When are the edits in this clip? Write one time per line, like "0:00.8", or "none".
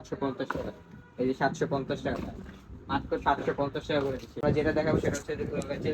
0:04.4